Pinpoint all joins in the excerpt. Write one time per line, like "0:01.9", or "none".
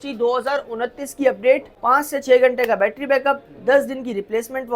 0:01.7